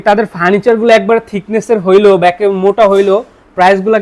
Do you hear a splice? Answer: no; 0 cuts

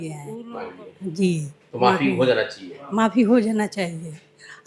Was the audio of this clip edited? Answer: no; 0 cuts

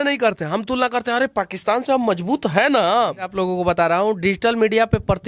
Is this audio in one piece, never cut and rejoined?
no; 1 cut; at 3.3 s

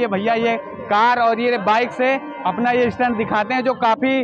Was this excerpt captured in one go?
yes; 0 cuts

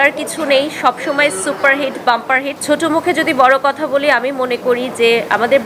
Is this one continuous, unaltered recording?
no; 1 cut; at 2.5 s

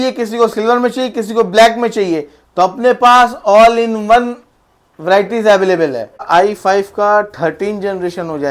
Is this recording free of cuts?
no; 1 cut; at 6.2 s

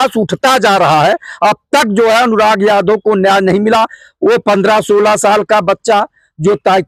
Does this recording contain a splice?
no; 0 cuts

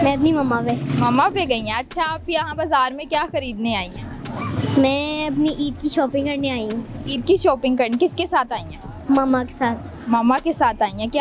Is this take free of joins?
yes; 0 cuts

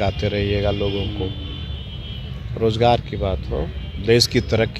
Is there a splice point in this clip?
no; 0 cuts

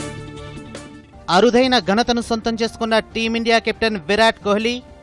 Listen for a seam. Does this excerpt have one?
no; 0 cuts

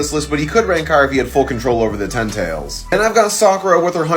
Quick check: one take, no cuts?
no; 1 cut; at 2.7 s

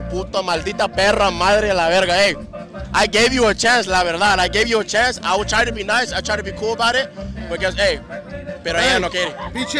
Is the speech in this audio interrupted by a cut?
no; 0 cuts

